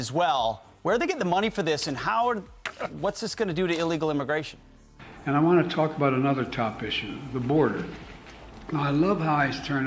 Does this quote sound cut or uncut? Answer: uncut